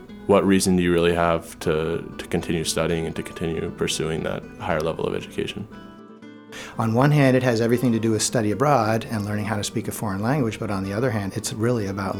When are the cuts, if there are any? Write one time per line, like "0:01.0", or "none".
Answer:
0:06.0
0:11.3